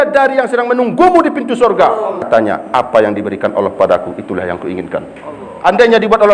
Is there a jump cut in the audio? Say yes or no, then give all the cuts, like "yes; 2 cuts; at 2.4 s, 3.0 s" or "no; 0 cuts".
yes; 1 cut; at 2.3 s